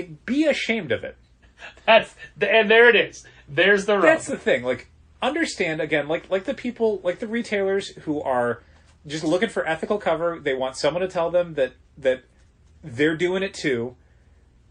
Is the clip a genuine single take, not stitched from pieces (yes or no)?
yes